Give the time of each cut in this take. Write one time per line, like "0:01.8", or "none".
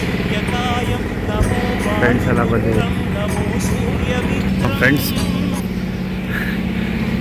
0:04.5